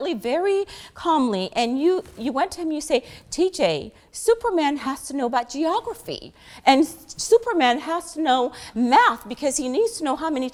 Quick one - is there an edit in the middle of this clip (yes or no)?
no